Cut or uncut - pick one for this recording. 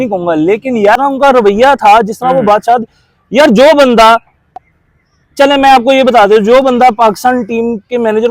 cut